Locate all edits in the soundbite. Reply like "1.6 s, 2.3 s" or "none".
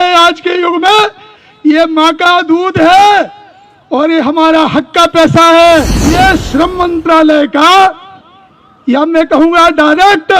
6.1 s